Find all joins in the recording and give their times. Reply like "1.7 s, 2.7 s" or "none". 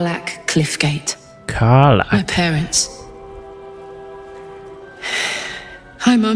none